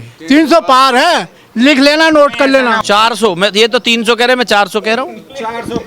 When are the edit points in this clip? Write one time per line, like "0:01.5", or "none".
0:02.8

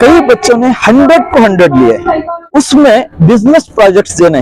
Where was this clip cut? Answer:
0:02.2

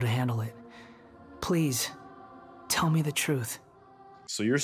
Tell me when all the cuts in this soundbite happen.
none

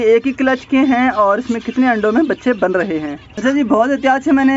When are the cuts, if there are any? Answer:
none

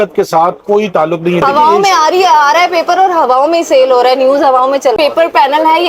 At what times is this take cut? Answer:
0:01.4
0:05.0

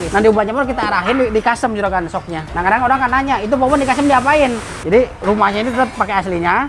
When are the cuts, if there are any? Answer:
0:04.7

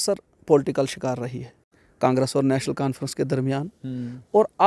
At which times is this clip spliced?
0:01.8

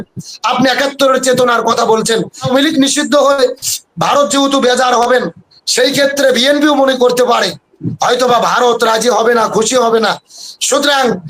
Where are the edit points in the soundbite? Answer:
0:02.4

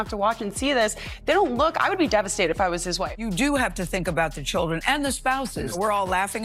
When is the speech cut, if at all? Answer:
none

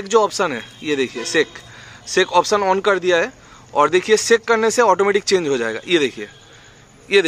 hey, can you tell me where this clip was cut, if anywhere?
none

